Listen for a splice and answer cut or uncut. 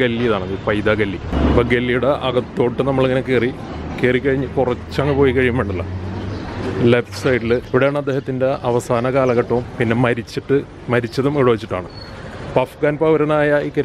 cut